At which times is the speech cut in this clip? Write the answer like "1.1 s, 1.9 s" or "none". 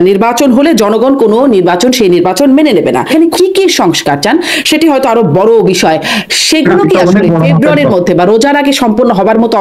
3.1 s